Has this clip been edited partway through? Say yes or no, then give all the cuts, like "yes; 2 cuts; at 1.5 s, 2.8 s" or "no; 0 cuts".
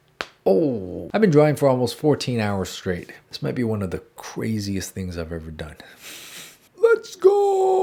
no; 0 cuts